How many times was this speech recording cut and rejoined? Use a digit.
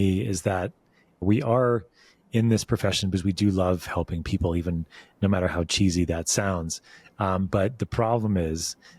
1